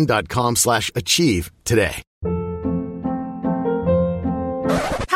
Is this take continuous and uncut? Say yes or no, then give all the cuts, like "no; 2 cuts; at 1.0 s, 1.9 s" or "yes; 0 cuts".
no; 1 cut; at 2.1 s